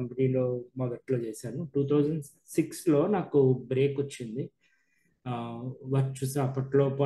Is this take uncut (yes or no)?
yes